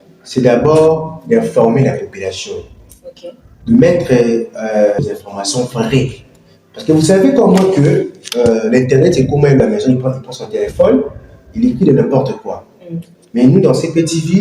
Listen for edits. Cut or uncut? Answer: cut